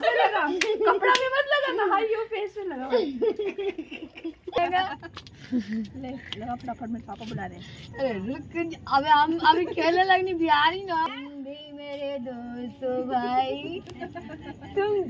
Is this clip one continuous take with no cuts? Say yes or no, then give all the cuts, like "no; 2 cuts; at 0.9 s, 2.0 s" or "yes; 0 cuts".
no; 2 cuts; at 4.6 s, 11.1 s